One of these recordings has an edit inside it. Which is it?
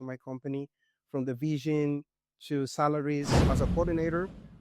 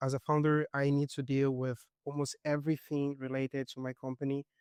first; 1 cut; at 3.4 s

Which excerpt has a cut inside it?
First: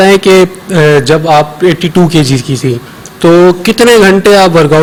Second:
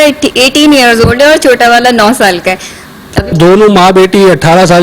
second; 1 cut; at 3.3 s

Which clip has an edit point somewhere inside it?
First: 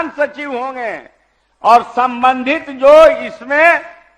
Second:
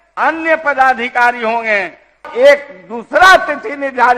second; 1 cut; at 2.3 s

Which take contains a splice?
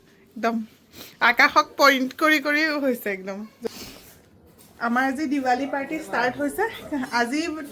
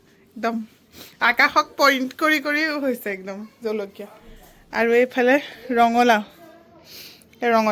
first; 1 cut; at 3.7 s

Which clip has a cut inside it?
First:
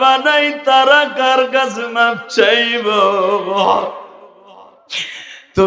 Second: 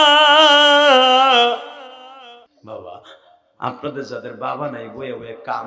second; 1 cut; at 2.5 s

